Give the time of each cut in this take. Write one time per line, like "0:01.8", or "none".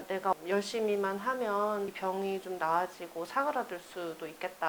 none